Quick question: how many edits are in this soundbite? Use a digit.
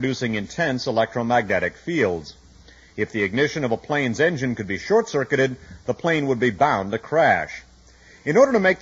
1